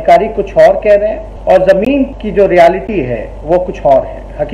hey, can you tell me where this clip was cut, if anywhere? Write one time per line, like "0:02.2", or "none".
0:01.3
0:02.2